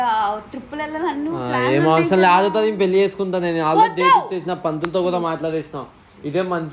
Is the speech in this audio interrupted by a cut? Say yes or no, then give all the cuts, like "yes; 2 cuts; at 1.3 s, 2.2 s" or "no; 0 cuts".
yes; 1 cut; at 2.2 s